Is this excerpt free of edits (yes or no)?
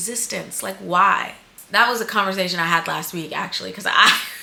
yes